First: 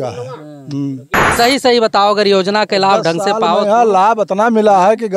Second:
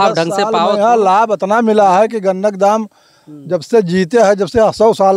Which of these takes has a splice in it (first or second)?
first